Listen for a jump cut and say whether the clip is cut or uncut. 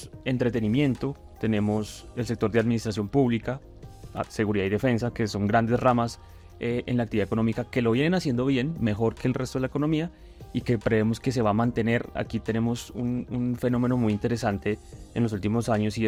uncut